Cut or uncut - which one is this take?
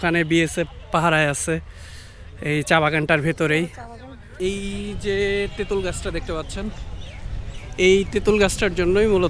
cut